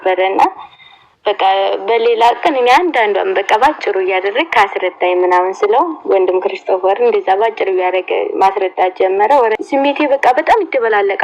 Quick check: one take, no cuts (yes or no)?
no